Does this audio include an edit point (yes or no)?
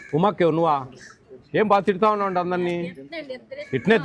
no